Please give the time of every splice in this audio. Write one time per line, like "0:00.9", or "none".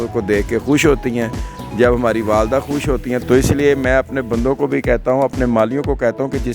0:03.2